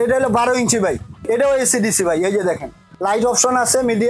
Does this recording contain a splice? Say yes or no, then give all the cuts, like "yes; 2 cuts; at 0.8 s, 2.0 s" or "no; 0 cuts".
yes; 2 cuts; at 1.2 s, 2.8 s